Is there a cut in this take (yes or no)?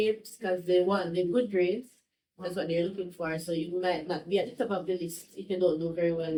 no